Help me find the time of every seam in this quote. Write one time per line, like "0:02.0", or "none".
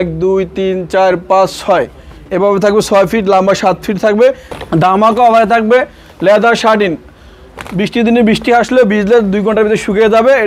0:04.5